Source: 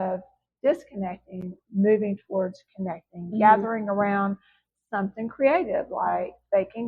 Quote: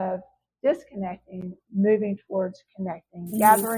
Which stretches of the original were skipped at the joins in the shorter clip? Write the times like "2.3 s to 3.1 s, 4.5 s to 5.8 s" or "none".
none